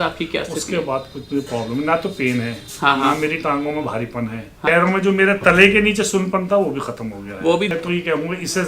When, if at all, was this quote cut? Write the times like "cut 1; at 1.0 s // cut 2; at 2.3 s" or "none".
cut 1; at 4.7 s // cut 2; at 7.7 s

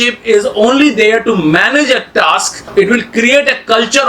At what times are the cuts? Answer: cut 1; at 2.7 s

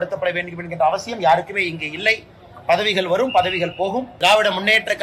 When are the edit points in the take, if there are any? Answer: cut 1; at 4.1 s

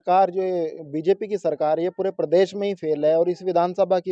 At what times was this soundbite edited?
none

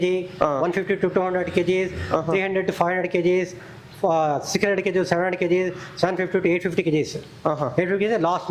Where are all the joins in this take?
none

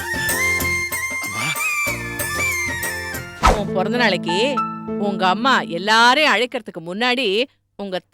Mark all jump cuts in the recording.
cut 1; at 3.4 s

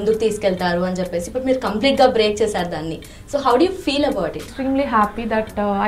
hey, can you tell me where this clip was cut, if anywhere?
cut 1; at 4.5 s

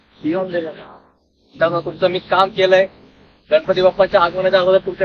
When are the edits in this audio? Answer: none

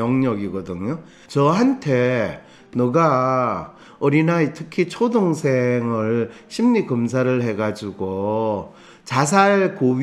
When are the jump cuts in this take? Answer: cut 1; at 1.2 s

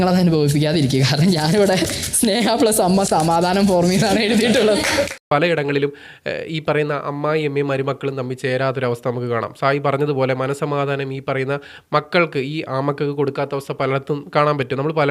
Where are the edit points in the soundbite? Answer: cut 1; at 5.3 s

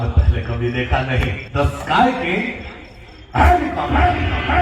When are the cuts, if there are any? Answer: cut 1; at 1.4 s

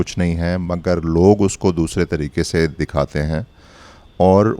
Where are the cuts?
none

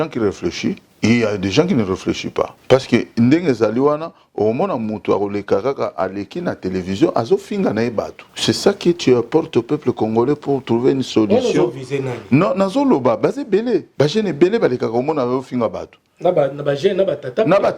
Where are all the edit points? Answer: cut 1; at 0.9 s // cut 2; at 2.6 s // cut 3; at 8.2 s // cut 4; at 13.9 s

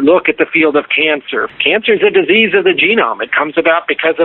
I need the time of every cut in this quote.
cut 1; at 1.5 s

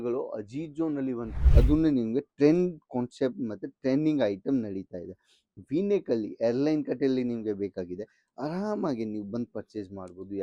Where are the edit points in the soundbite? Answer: cut 1; at 1.4 s

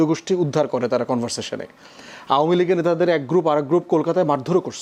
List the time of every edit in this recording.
none

